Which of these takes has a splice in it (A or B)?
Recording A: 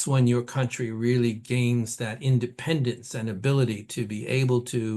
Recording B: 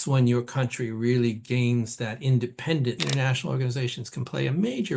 B